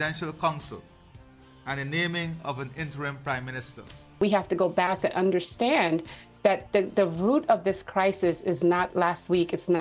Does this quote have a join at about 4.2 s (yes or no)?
yes